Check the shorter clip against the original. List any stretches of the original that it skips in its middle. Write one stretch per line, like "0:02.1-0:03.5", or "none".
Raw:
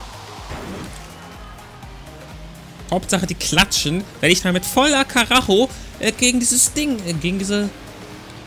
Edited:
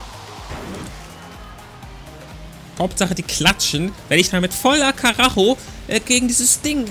0:02.6-0:02.8